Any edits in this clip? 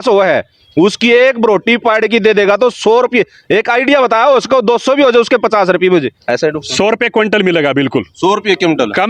no; 0 cuts

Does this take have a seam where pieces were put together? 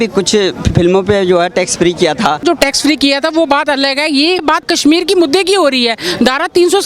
yes; 2 cuts; at 2.4 s, 4.5 s

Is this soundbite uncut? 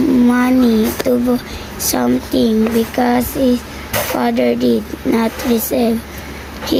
yes; 0 cuts

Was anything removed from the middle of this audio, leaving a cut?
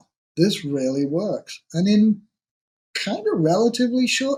no; 0 cuts

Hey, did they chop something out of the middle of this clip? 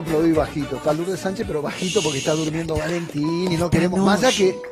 no; 0 cuts

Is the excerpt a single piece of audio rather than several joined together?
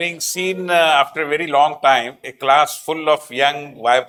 yes; 0 cuts

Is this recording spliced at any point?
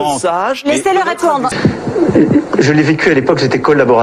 yes; 1 cut; at 1.5 s

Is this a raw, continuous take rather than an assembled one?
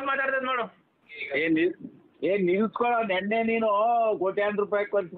yes; 0 cuts

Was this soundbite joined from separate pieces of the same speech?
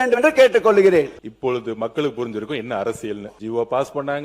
yes; 2 cuts; at 1.2 s, 3.3 s

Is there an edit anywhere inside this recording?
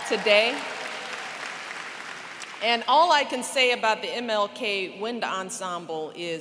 no; 0 cuts

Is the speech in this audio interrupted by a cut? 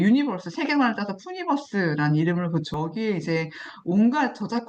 yes; 1 cut; at 2.7 s

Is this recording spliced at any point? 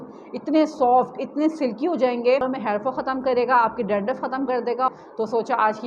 yes; 2 cuts; at 2.4 s, 4.9 s

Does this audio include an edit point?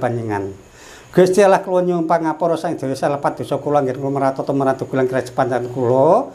no; 0 cuts

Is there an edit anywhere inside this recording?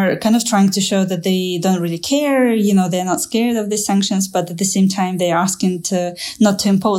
no; 0 cuts

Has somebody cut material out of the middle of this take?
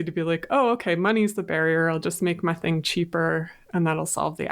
no; 0 cuts

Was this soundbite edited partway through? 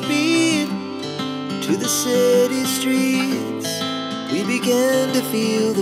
no; 0 cuts

